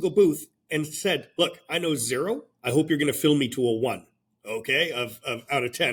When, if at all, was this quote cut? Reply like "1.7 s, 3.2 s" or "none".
none